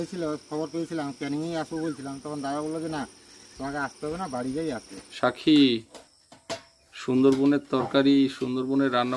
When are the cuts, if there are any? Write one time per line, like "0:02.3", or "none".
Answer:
0:05.0

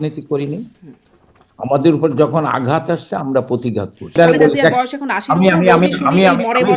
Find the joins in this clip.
0:04.1

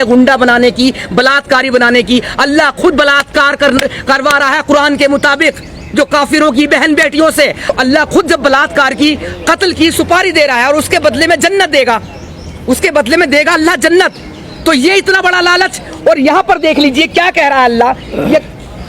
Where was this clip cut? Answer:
none

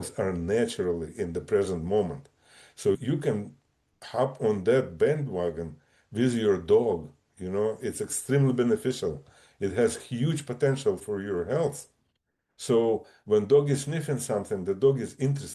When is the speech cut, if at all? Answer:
0:03.0
0:11.0

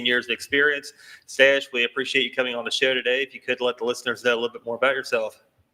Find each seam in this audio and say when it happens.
none

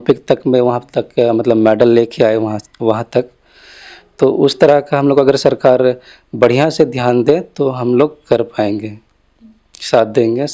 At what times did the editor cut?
none

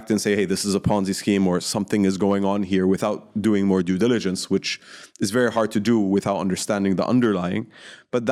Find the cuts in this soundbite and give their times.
none

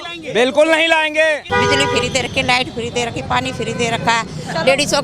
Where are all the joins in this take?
0:01.4

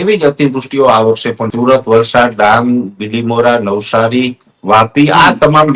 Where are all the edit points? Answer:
0:01.5

